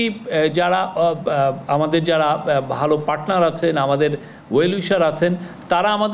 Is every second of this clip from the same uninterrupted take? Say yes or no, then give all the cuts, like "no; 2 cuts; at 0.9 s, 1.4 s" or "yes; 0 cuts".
yes; 0 cuts